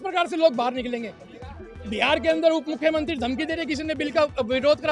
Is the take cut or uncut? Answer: uncut